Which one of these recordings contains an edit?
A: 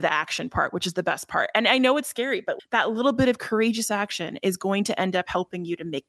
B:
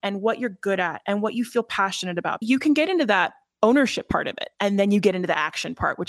B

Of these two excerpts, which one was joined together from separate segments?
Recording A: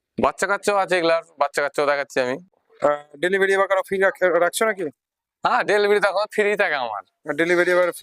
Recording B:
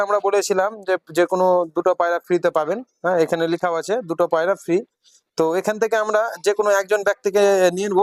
A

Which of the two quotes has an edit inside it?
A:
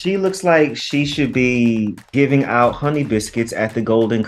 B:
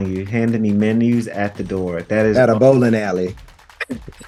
A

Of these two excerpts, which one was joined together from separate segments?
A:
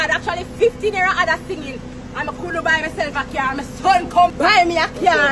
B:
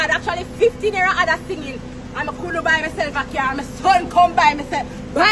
A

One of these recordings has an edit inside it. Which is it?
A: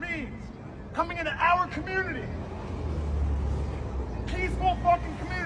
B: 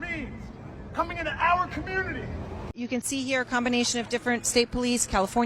B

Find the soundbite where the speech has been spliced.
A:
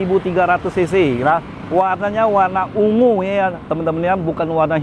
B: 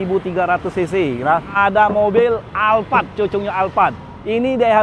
B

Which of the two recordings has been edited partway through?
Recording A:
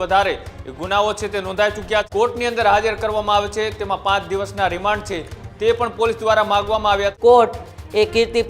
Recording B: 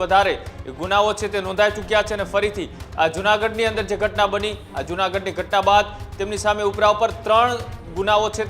A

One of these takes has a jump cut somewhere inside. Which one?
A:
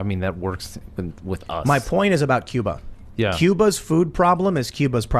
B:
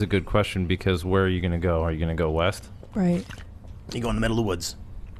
A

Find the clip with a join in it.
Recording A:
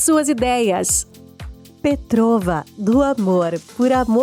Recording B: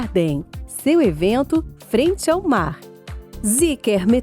B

